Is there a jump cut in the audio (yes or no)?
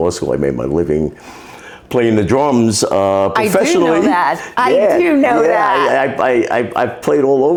no